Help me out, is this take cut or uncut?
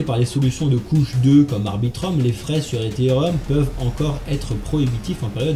uncut